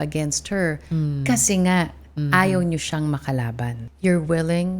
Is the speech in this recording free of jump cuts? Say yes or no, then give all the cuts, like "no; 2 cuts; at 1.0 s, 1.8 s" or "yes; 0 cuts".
no; 1 cut; at 3.8 s